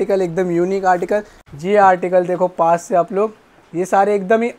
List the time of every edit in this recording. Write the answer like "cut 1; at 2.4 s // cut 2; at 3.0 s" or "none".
cut 1; at 1.4 s